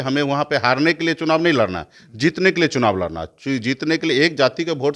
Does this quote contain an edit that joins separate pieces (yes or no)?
no